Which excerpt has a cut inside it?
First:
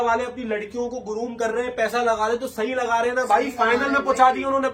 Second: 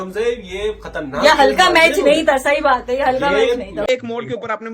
second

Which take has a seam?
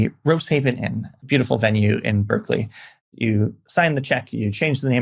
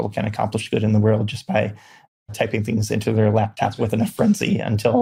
first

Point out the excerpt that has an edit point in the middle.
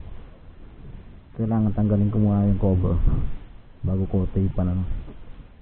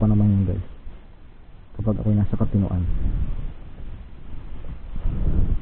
second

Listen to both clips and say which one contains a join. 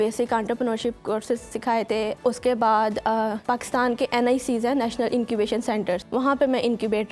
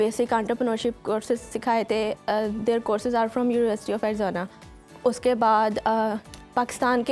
first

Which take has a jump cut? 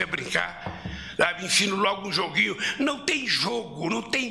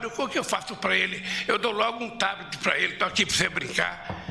first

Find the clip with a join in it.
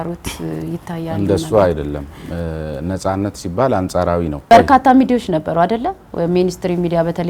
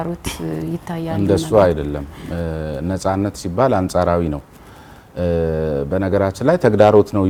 first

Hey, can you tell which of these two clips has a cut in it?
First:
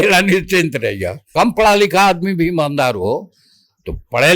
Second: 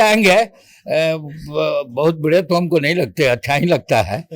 first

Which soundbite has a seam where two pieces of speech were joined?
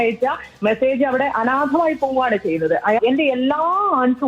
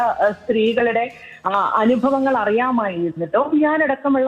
first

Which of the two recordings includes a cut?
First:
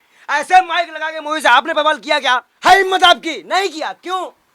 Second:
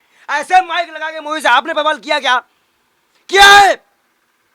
first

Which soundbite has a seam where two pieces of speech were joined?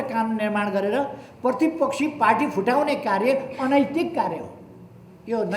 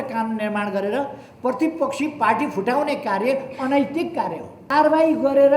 second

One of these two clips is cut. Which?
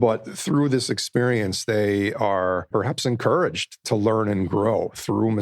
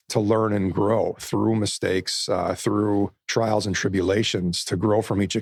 first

